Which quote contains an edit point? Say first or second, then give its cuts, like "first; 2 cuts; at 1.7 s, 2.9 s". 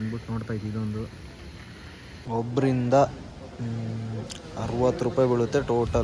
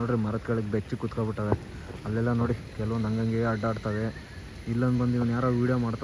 first; 1 cut; at 2.2 s